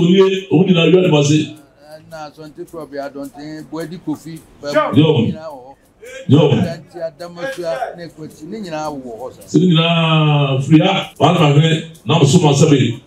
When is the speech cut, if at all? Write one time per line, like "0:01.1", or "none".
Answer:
0:11.1